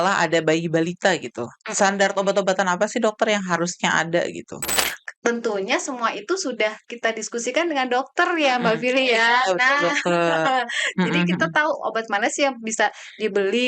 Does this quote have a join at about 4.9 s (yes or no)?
yes